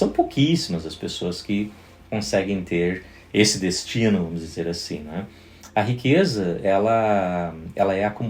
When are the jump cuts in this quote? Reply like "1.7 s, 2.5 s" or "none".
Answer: none